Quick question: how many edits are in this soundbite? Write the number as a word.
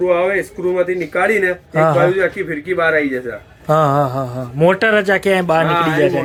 zero